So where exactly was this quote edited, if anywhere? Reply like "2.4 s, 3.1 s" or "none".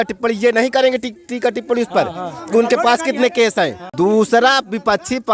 3.8 s